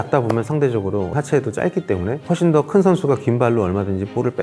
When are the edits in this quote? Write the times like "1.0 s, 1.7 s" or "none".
1.1 s, 2.2 s